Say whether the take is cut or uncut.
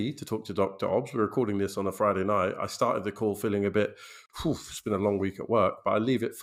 uncut